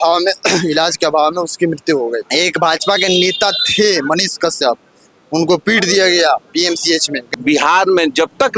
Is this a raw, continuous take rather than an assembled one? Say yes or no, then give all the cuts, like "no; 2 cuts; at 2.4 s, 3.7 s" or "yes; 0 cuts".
no; 2 cuts; at 2.3 s, 7.2 s